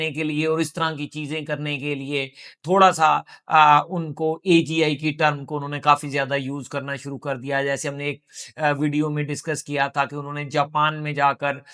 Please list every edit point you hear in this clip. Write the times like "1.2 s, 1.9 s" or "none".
none